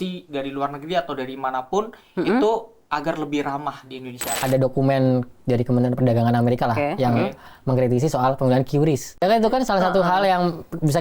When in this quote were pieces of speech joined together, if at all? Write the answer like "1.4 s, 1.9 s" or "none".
4.3 s, 9.2 s